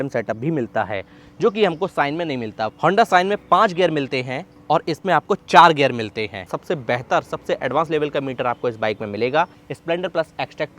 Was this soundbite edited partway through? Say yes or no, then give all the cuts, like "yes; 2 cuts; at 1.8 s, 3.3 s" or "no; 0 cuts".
yes; 3 cuts; at 2.7 s, 6.4 s, 9.7 s